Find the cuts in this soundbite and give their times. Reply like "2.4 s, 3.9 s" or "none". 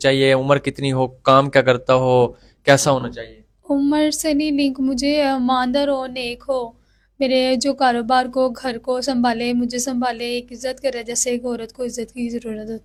none